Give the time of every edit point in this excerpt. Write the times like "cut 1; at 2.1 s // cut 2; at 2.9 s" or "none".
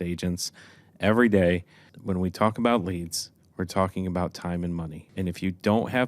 cut 1; at 1.9 s // cut 2; at 5.0 s